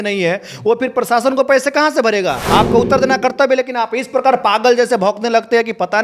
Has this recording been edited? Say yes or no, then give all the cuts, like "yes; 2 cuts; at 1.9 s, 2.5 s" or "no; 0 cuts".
yes; 1 cut; at 2.4 s